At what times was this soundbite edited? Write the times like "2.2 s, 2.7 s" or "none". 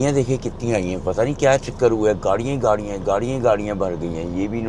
none